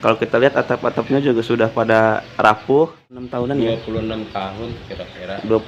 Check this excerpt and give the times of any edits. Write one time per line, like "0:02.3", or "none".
0:03.3